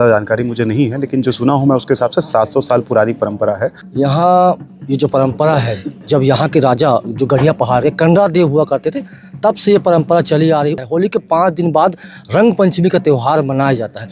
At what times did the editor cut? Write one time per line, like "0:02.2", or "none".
0:03.8
0:10.8